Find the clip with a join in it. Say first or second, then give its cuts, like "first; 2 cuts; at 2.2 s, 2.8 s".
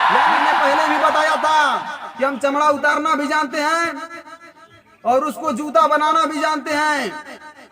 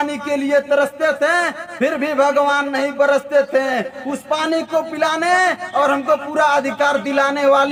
first; 1 cut; at 1.0 s